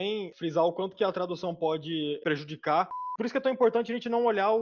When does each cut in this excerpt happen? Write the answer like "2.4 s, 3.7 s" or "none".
3.1 s